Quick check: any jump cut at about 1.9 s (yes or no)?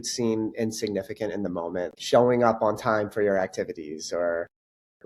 yes